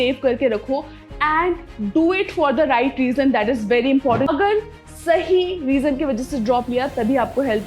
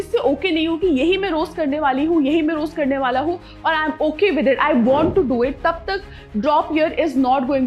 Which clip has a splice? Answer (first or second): first